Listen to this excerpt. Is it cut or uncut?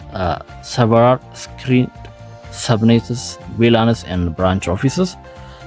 uncut